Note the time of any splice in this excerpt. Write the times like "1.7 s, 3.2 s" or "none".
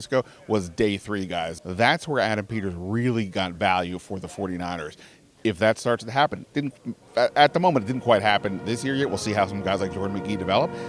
1.5 s